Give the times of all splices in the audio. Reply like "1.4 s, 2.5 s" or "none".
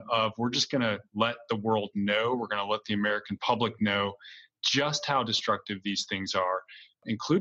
1.1 s